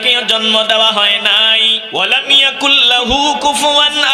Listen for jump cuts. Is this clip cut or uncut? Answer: cut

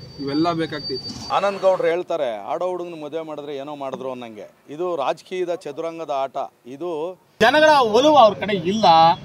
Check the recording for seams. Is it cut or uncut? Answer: cut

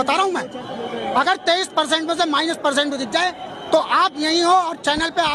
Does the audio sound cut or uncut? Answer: uncut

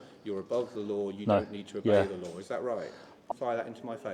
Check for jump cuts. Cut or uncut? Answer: cut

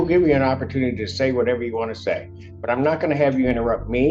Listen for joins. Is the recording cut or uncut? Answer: uncut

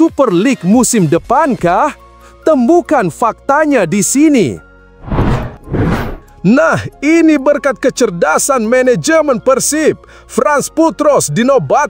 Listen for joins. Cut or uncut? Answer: cut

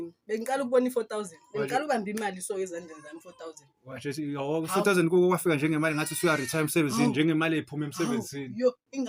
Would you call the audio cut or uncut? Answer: uncut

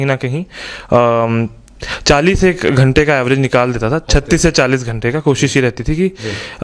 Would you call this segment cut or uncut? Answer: uncut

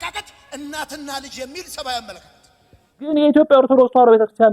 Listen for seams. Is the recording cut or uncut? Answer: cut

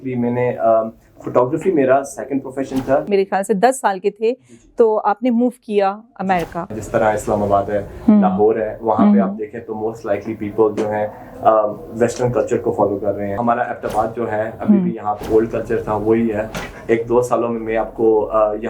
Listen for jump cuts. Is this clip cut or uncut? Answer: cut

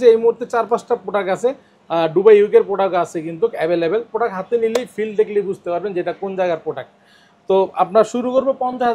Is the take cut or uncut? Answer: uncut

